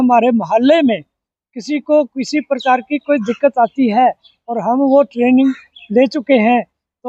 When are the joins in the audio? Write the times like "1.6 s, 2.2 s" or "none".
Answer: none